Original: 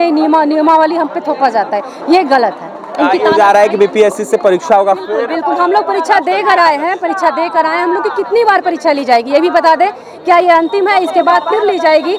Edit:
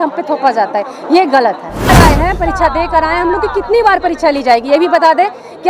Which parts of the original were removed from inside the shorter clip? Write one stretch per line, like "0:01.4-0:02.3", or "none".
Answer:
0:02.9-0:06.6